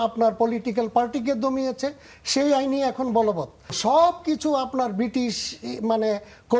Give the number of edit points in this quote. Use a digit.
1